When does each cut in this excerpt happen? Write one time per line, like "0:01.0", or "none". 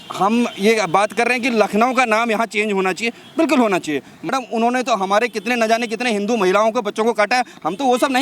0:04.3